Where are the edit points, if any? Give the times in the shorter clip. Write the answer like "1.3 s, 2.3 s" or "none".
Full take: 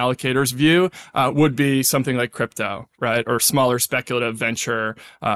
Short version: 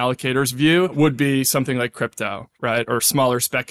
0.9 s